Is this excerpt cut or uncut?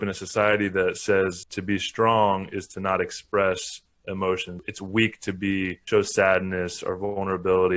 cut